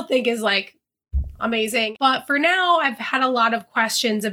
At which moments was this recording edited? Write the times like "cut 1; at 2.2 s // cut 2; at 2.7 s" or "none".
cut 1; at 1.9 s